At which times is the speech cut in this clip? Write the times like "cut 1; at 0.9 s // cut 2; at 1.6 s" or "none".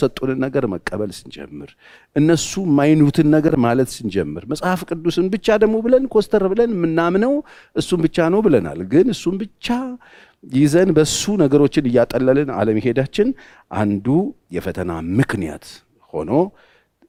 none